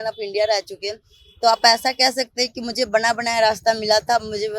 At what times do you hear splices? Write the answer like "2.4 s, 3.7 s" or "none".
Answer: none